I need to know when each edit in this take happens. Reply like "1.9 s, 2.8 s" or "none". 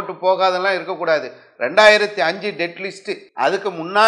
3.2 s